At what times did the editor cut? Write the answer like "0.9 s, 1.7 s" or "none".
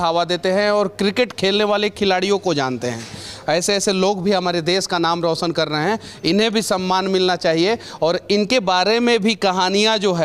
none